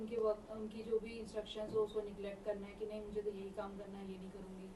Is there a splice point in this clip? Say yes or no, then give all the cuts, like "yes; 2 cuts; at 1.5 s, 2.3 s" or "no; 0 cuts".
no; 0 cuts